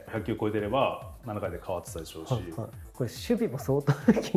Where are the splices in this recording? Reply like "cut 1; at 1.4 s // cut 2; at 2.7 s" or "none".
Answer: cut 1; at 2.8 s